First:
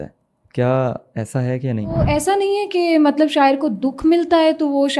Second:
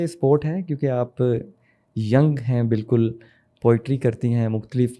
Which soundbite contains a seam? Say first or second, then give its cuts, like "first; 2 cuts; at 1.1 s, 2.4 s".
first; 1 cut; at 2.0 s